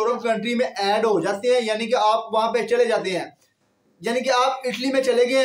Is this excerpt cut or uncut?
uncut